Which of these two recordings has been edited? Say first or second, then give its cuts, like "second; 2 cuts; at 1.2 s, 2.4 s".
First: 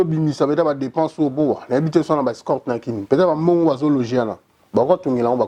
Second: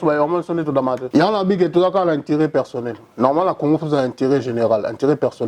second; 1 cut; at 1.0 s